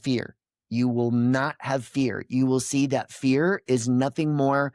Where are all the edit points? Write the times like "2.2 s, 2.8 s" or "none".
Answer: none